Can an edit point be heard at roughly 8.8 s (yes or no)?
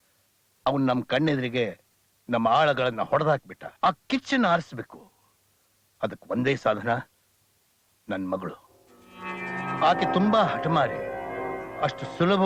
no